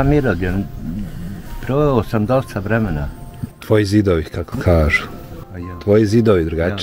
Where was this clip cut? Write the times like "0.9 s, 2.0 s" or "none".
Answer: none